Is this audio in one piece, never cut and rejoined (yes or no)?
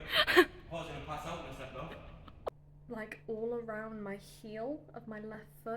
no